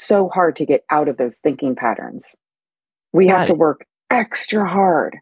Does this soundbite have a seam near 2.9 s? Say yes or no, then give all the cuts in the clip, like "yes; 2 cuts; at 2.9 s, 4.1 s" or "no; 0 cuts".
yes; 1 cut; at 2.9 s